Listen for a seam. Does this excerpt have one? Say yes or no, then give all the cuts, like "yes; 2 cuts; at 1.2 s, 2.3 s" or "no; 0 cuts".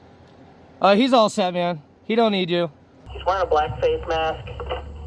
yes; 1 cut; at 3.0 s